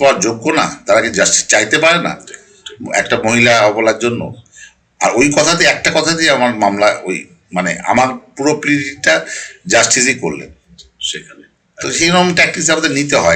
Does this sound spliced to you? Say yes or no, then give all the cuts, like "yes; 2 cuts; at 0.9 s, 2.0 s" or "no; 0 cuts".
no; 0 cuts